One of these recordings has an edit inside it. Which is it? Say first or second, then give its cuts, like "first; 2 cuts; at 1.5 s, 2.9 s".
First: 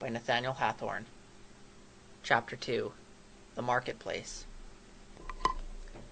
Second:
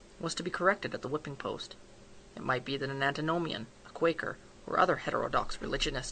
second; 1 cut; at 4.7 s